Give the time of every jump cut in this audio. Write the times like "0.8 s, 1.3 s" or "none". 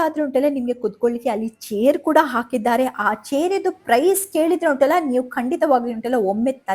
none

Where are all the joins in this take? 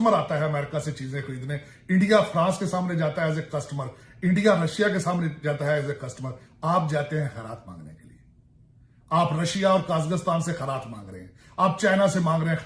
none

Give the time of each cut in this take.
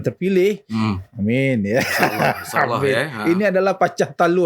none

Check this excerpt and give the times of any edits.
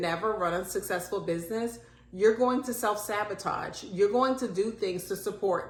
none

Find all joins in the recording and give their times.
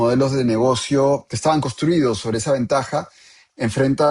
1.3 s

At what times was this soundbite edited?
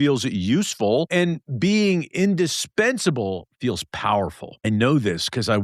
1.1 s, 4.6 s

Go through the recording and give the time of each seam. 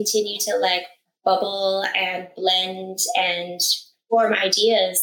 3.9 s

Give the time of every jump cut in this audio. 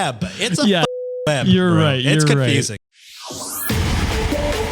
3.2 s

